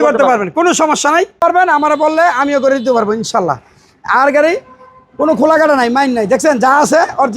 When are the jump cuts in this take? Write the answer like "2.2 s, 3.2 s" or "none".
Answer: 1.4 s